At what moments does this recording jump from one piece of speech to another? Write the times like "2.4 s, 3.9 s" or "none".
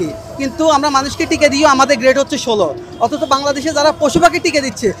none